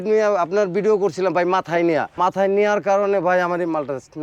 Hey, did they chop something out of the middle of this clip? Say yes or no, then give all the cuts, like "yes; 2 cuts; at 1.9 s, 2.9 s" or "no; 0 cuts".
yes; 1 cut; at 2.1 s